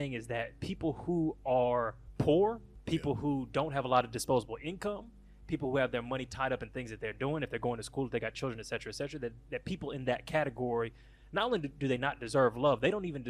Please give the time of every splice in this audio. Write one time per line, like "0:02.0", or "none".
0:02.0
0:02.7